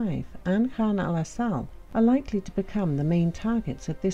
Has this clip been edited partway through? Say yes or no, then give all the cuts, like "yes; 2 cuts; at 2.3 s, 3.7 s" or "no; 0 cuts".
no; 0 cuts